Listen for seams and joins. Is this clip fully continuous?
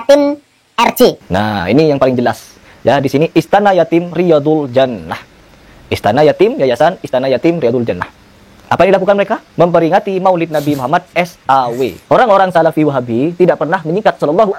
no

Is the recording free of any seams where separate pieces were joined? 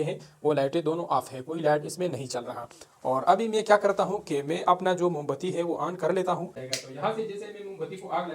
no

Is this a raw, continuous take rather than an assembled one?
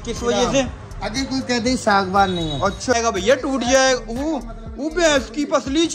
no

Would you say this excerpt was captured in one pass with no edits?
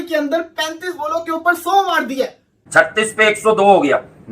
no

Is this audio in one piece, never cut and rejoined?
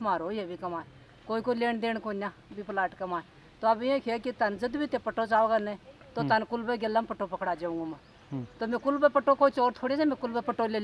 yes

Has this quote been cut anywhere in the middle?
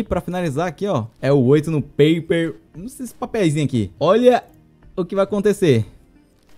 yes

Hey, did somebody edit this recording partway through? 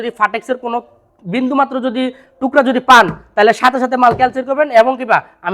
no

